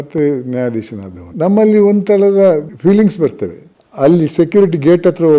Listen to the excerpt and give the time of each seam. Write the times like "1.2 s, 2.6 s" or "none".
3.7 s